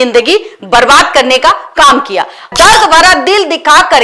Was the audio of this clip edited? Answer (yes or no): yes